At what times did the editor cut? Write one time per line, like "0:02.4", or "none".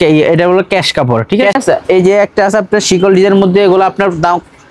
0:01.5